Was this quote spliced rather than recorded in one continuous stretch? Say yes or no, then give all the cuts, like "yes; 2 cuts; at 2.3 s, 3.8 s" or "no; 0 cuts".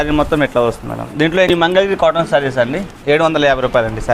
yes; 1 cut; at 1.5 s